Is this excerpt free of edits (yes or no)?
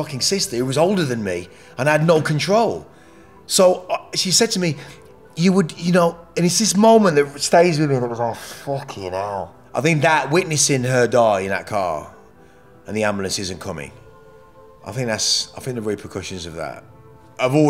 no